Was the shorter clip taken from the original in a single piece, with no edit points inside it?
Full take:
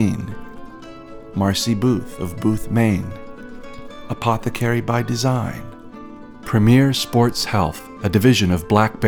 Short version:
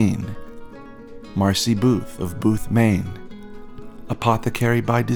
yes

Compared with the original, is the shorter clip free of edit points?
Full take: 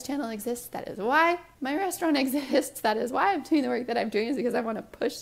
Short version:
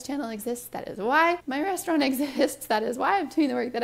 no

